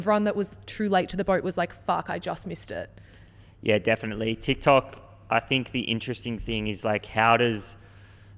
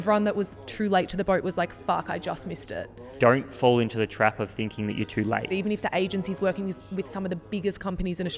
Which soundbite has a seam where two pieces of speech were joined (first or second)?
second